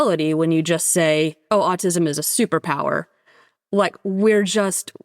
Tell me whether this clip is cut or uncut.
cut